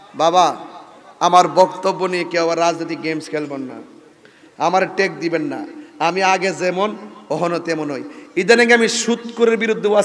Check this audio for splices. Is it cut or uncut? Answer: uncut